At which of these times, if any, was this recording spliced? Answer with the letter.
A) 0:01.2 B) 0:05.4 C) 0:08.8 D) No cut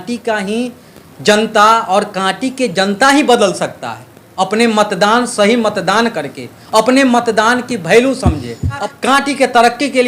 C